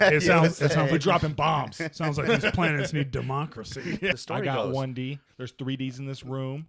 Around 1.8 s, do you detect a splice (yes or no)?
no